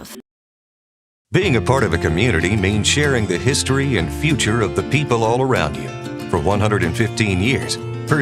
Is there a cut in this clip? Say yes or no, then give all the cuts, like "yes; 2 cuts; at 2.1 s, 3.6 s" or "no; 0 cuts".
yes; 1 cut; at 2.9 s